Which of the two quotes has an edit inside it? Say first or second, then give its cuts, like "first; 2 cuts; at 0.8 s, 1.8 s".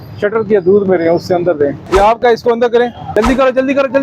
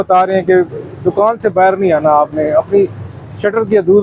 first; 2 cuts; at 1.8 s, 3.0 s